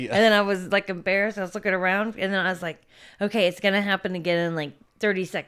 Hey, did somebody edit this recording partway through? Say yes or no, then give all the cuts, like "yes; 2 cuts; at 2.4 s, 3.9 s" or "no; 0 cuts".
no; 0 cuts